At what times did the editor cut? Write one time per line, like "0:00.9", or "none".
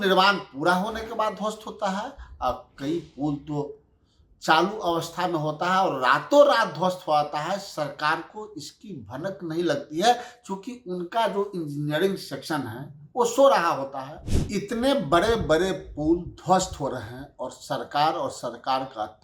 0:14.4